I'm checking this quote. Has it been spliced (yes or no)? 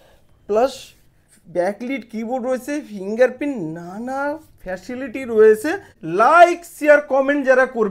yes